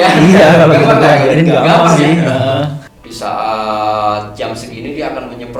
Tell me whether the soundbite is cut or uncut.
cut